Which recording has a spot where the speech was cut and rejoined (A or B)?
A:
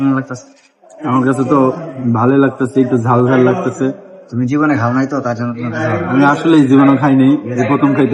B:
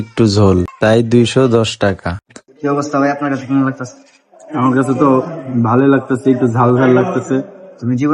B